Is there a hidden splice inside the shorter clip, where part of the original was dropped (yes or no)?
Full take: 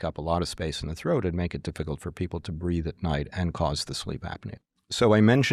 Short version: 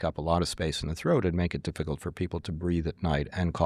no